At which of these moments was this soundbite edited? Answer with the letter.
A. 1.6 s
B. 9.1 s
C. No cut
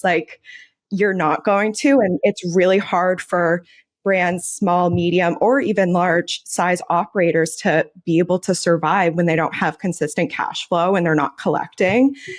B